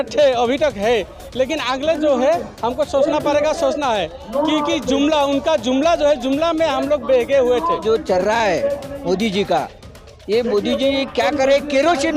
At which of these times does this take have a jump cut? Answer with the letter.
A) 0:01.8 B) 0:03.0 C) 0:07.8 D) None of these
C